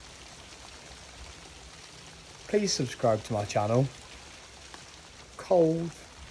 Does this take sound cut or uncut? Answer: cut